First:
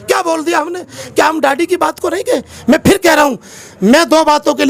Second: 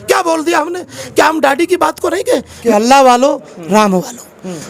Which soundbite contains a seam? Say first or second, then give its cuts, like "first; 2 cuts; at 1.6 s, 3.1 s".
second; 1 cut; at 2.5 s